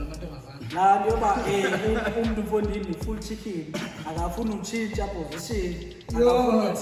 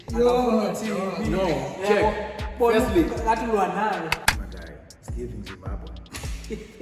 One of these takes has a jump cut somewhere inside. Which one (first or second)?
second